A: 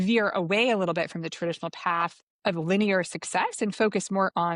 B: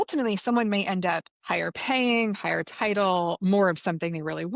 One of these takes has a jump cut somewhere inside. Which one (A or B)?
B